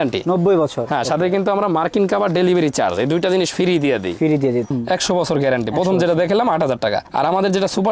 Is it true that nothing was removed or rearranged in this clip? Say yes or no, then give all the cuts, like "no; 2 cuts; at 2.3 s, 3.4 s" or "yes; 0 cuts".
no; 1 cut; at 4.7 s